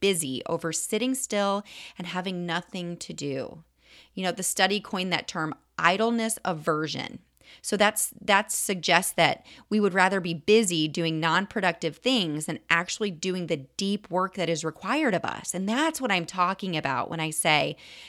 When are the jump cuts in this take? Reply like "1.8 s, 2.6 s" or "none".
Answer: none